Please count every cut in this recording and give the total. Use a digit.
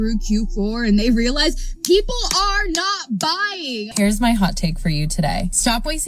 1